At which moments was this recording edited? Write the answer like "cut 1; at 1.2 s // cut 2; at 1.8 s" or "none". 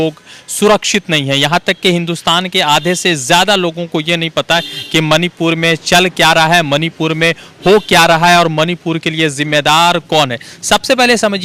none